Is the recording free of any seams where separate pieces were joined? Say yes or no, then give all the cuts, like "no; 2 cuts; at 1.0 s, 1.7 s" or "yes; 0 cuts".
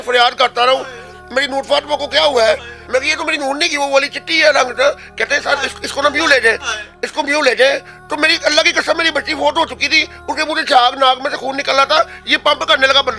no; 1 cut; at 2.7 s